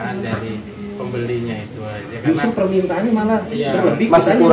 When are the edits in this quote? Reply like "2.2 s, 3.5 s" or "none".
none